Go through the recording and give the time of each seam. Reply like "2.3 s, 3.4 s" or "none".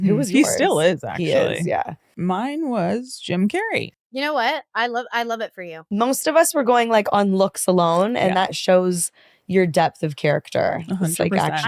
2.1 s, 4.0 s, 5.6 s